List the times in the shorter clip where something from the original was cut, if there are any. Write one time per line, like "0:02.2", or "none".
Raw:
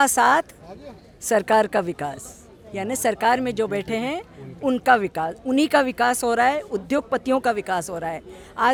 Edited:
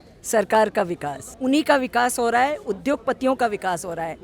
0:01.3